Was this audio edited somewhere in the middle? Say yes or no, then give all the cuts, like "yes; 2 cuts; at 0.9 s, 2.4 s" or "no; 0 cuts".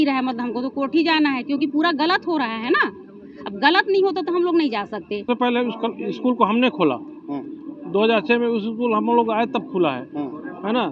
yes; 1 cut; at 5.3 s